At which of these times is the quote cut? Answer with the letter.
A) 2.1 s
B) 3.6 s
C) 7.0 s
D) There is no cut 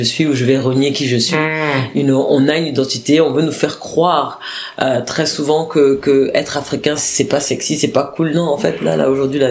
C